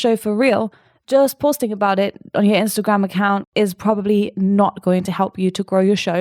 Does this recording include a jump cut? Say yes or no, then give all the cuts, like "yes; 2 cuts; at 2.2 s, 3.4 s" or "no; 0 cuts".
yes; 1 cut; at 3.5 s